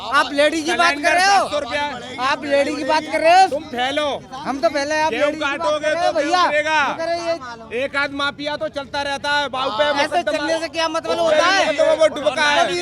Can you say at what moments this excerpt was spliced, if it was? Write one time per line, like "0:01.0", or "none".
none